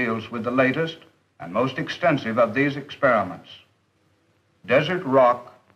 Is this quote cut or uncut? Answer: uncut